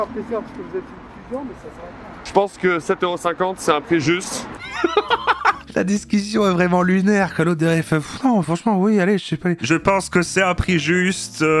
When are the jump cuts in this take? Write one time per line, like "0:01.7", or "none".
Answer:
0:04.6
0:09.6